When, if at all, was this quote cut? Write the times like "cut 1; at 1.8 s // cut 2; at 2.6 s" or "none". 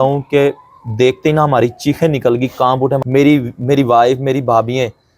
cut 1; at 3.0 s

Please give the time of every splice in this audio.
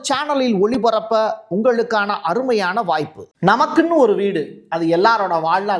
cut 1; at 3.2 s

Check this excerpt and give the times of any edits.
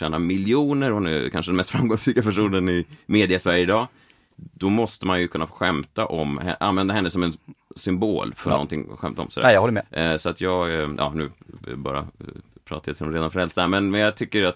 none

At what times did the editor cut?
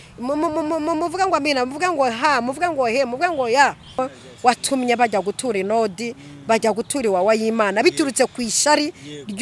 cut 1; at 4.0 s

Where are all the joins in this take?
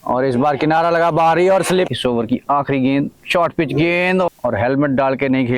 cut 1; at 1.9 s // cut 2; at 4.3 s

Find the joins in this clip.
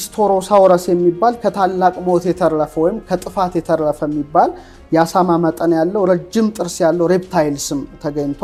none

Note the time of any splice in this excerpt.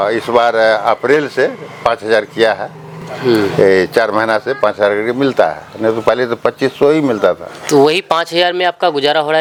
none

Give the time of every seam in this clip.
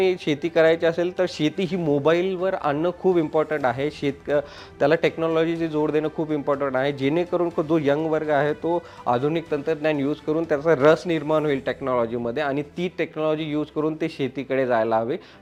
none

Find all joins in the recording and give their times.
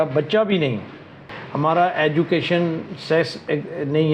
cut 1; at 1.2 s

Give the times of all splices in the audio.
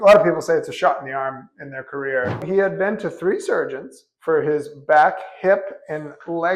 cut 1; at 2.4 s

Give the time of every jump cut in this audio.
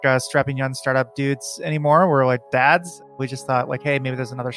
cut 1; at 3.1 s

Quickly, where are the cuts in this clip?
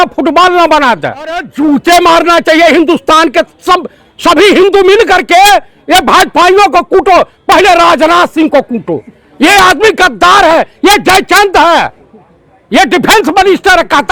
cut 1; at 1.5 s

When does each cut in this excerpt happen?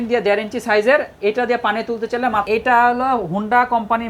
cut 1; at 2.4 s

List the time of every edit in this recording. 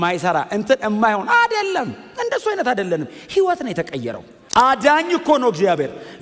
cut 1; at 4.3 s

